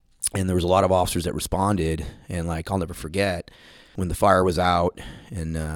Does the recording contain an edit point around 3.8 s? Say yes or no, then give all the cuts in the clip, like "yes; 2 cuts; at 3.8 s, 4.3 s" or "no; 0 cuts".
yes; 1 cut; at 3.8 s